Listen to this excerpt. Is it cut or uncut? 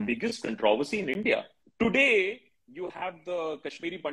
cut